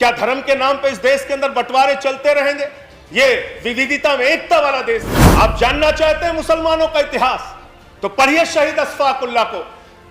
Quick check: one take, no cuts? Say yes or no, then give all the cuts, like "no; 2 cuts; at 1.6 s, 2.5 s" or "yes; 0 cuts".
no; 1 cut; at 5.2 s